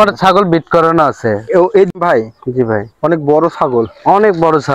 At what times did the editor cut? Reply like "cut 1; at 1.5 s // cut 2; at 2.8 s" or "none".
cut 1; at 1.9 s